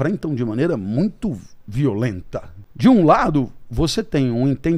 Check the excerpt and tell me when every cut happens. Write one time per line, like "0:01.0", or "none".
0:02.6